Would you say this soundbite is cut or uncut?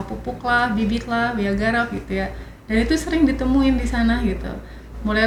uncut